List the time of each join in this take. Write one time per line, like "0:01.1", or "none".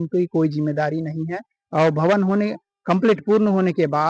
none